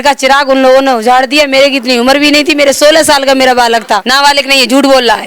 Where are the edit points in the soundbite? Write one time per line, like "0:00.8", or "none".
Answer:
0:04.0